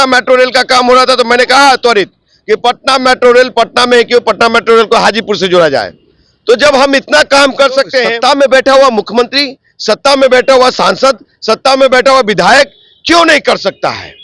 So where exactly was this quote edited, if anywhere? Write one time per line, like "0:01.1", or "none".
0:08.1